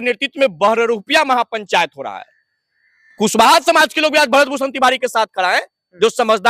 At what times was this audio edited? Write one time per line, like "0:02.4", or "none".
none

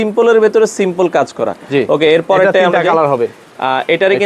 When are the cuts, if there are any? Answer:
none

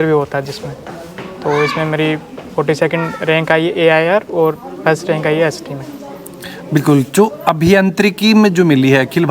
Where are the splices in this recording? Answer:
none

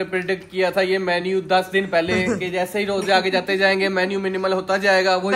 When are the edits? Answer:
none

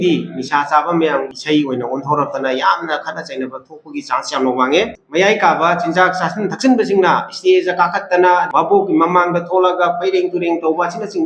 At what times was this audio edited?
0:01.3
0:05.0
0:08.5

